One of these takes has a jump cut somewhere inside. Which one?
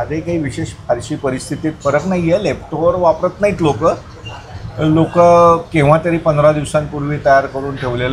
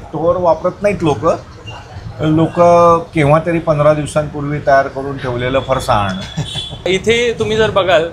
second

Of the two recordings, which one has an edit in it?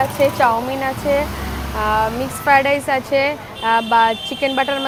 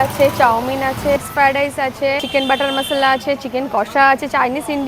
second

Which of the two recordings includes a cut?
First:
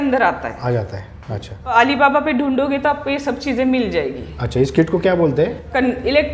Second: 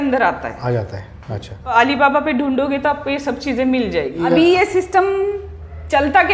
second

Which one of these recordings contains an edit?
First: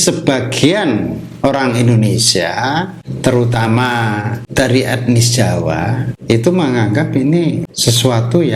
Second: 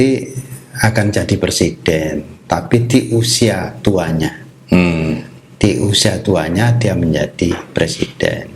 first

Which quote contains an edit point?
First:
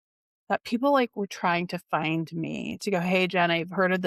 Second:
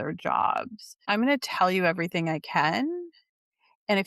second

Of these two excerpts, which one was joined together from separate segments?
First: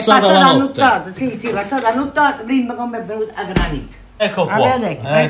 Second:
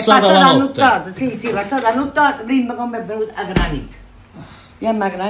first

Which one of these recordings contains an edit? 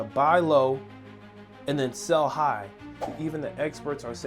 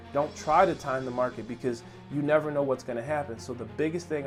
first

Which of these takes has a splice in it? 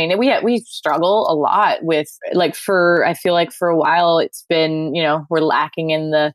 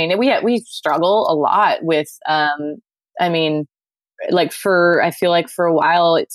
first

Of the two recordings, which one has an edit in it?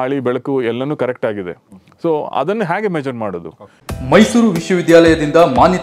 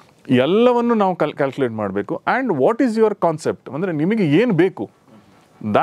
first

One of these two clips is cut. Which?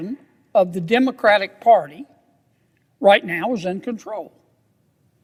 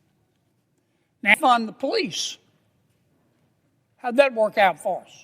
second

